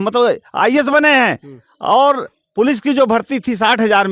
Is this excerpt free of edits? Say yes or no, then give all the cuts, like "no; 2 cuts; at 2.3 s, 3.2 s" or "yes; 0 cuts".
yes; 0 cuts